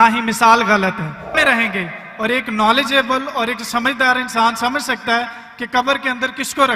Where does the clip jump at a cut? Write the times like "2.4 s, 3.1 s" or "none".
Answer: 1.3 s